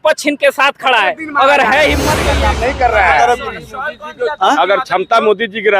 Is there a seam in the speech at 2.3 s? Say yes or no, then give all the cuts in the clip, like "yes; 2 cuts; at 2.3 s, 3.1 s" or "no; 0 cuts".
yes; 1 cut; at 2.3 s